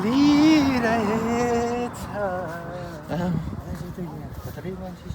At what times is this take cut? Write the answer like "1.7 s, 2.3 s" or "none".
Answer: 2.7 s